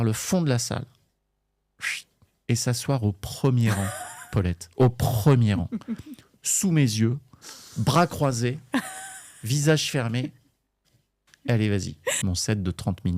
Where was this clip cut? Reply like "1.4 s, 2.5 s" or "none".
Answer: 12.2 s